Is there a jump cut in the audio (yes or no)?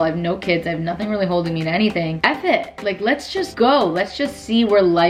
no